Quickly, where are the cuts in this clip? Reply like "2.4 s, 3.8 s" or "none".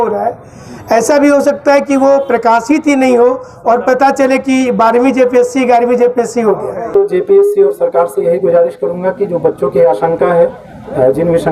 6.9 s